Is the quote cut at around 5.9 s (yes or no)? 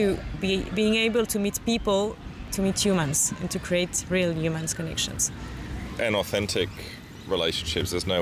yes